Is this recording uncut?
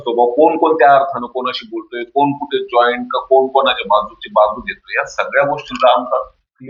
yes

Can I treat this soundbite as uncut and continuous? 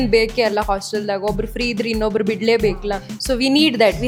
yes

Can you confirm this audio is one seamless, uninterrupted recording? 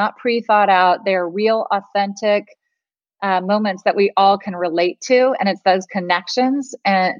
yes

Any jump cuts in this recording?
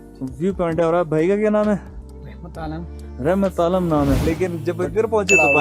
yes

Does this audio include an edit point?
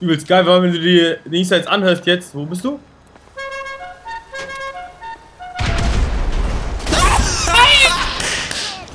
no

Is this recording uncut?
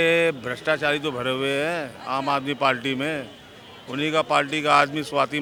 yes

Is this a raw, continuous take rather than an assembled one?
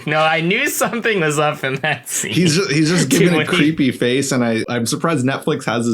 no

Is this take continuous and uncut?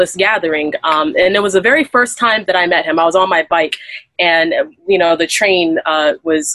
yes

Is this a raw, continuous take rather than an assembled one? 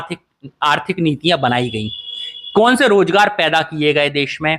yes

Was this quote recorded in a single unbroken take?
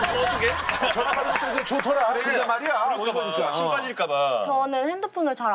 yes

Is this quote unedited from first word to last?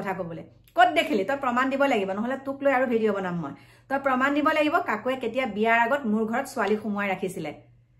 yes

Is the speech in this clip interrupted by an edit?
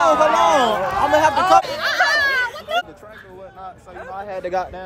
yes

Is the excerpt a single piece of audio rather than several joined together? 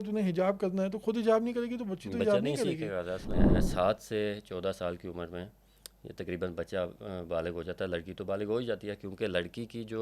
no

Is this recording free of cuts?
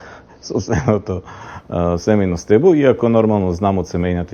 yes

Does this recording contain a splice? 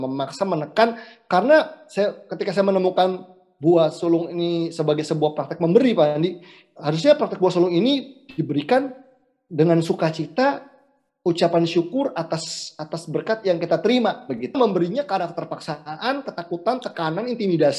yes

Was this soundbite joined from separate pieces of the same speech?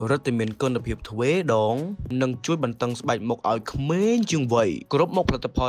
no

